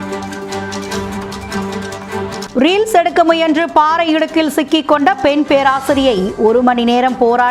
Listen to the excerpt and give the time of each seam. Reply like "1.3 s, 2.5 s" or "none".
2.4 s